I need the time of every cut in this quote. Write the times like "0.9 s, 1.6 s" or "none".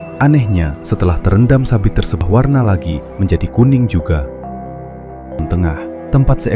2.2 s, 5.4 s